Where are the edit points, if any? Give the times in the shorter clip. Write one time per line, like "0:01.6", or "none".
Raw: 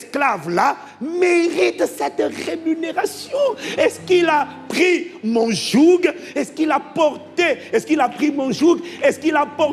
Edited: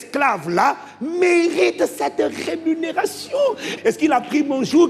0:03.7